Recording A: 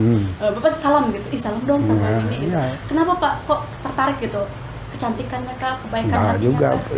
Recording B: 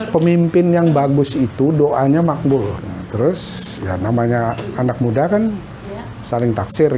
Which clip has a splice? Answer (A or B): B